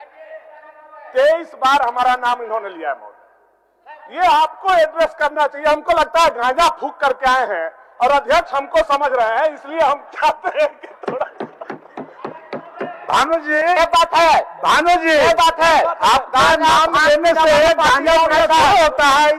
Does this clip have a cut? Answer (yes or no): no